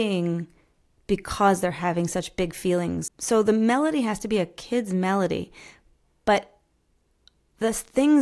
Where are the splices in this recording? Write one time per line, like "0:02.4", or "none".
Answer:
0:03.1